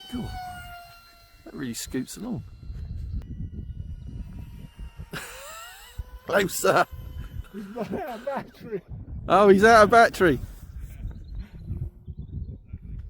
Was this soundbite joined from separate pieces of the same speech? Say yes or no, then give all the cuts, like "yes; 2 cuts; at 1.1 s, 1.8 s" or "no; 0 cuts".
yes; 1 cut; at 3.2 s